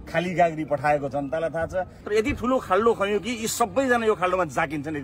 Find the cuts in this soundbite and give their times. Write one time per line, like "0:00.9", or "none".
0:02.0